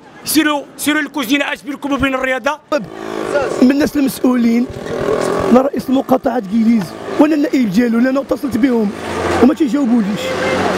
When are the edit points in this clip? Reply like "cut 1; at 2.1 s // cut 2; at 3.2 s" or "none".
cut 1; at 2.7 s